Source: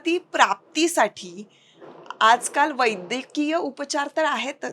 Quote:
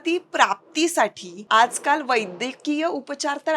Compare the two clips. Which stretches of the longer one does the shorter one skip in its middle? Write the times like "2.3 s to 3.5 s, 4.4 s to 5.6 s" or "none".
1.3 s to 2.0 s